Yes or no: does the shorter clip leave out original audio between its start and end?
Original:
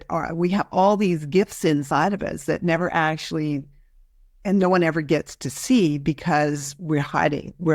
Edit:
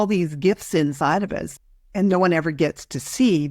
yes